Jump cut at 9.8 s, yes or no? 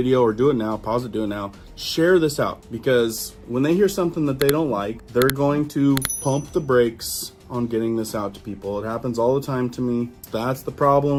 no